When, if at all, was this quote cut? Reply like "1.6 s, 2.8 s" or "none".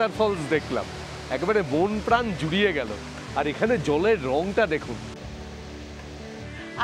none